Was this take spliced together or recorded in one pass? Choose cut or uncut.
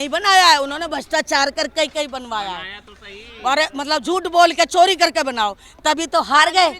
uncut